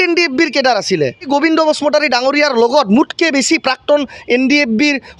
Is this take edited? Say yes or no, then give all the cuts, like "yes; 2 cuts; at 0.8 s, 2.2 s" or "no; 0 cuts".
yes; 1 cut; at 1.3 s